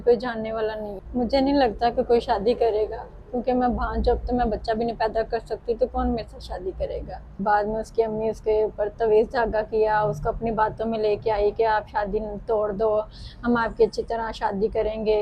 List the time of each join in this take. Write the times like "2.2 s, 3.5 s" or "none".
0.9 s, 7.4 s